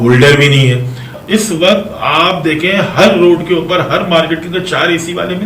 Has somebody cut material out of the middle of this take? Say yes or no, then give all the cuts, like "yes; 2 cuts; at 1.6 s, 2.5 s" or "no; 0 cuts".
yes; 1 cut; at 1.1 s